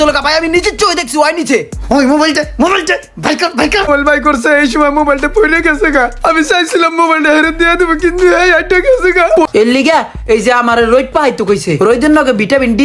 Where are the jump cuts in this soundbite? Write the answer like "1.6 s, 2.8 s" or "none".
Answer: 3.9 s, 9.5 s